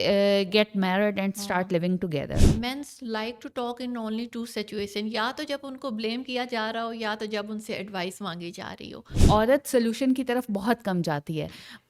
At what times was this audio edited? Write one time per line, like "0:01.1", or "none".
0:02.4
0:09.1